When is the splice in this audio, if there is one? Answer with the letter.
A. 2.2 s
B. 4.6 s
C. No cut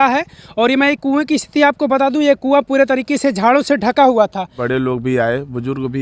B